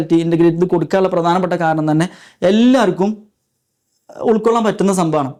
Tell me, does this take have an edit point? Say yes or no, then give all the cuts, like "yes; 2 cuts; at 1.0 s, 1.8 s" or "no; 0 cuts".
no; 0 cuts